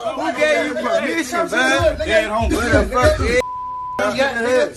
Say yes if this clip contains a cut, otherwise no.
no